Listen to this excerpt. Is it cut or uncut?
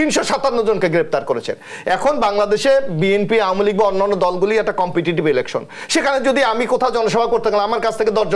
uncut